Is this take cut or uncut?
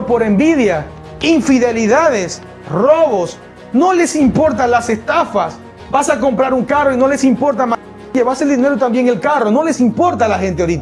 uncut